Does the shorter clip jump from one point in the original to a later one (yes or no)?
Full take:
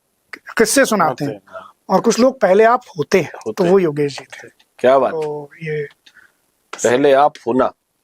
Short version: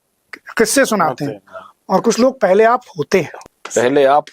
yes